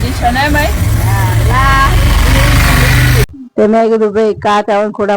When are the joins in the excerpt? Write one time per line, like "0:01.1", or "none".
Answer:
0:03.3